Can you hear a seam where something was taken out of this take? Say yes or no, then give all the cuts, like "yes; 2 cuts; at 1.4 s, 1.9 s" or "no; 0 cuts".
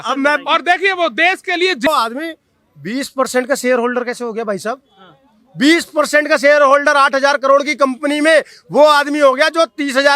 yes; 1 cut; at 1.9 s